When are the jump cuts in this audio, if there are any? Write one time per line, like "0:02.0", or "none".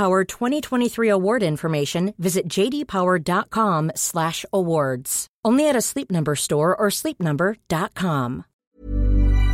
0:08.5